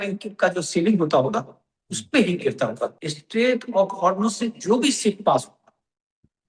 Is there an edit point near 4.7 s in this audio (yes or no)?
no